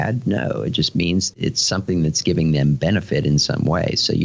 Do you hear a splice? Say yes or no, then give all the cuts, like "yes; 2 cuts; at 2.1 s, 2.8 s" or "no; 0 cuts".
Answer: yes; 1 cut; at 1.3 s